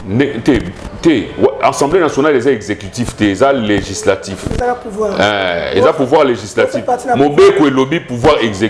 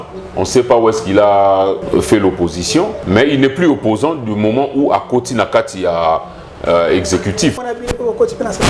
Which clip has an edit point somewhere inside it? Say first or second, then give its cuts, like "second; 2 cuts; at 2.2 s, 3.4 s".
second; 3 cuts; at 1.8 s, 3.0 s, 7.6 s